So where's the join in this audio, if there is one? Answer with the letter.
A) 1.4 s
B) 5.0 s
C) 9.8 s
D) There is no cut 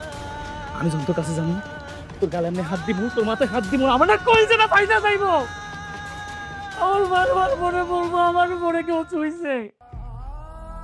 C